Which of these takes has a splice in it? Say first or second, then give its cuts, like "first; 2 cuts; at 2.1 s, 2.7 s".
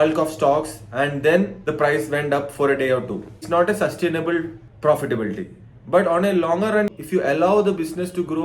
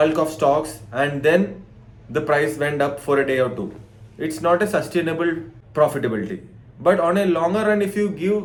first; 3 cuts; at 1.6 s, 3.4 s, 6.9 s